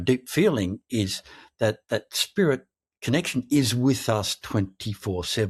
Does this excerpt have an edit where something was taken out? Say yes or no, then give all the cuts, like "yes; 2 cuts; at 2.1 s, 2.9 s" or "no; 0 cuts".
no; 0 cuts